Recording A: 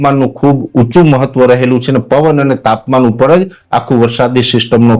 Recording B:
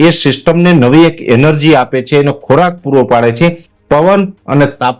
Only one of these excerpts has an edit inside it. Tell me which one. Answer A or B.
B